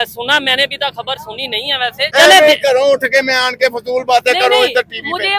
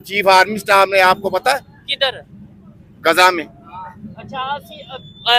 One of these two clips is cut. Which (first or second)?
first